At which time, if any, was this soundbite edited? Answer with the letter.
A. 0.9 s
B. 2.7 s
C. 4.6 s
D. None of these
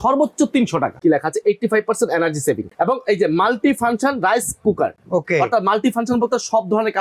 A